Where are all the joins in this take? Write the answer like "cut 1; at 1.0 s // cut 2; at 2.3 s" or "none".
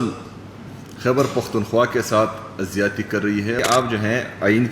cut 1; at 3.6 s